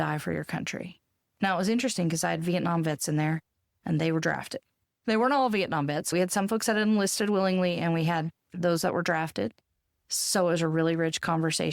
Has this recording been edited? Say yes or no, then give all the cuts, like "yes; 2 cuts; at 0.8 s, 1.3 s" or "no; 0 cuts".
no; 0 cuts